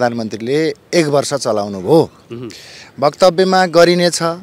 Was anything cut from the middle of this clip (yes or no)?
no